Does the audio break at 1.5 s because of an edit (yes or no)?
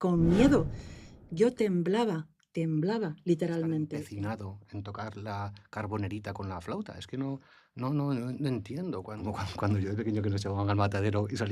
no